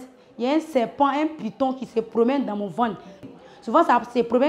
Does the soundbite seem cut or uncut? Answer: cut